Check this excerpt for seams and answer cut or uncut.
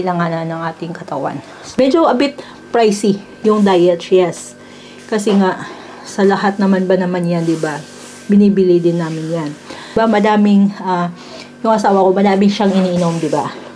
cut